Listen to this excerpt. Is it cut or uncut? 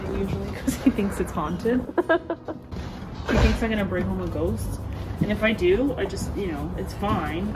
uncut